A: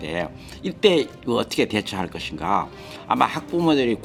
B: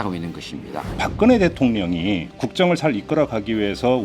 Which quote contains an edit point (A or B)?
B